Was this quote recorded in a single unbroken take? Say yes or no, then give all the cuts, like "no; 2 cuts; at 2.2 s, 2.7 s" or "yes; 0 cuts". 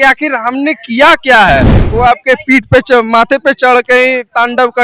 no; 1 cut; at 1.8 s